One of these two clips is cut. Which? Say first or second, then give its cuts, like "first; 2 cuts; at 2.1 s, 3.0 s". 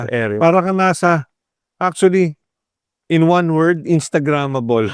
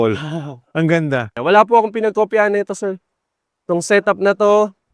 second; 1 cut; at 1.3 s